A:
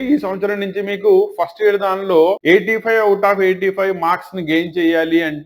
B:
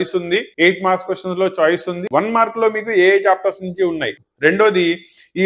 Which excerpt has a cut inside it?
B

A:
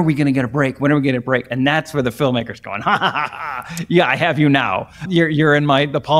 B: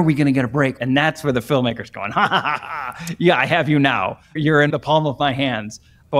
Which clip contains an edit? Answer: B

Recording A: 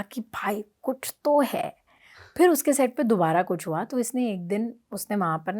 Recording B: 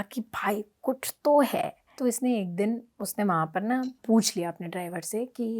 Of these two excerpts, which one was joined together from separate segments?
B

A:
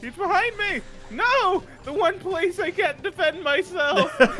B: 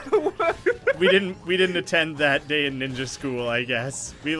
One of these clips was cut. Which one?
B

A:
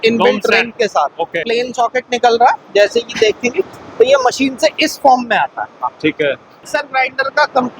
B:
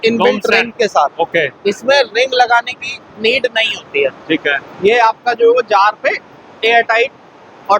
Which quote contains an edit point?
A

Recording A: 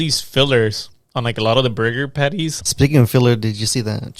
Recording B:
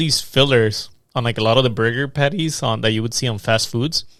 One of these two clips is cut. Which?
A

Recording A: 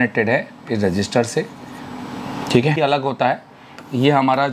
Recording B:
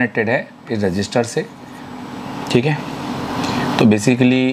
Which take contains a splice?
A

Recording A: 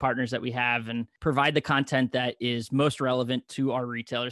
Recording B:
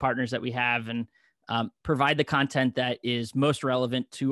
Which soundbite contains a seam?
A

